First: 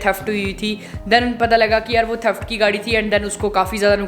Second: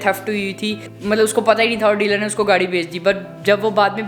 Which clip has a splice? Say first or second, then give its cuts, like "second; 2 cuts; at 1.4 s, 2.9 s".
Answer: first; 1 cut; at 1.0 s